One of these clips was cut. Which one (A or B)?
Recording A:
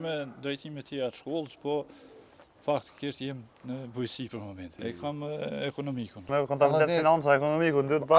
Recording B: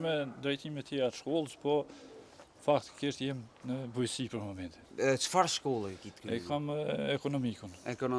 A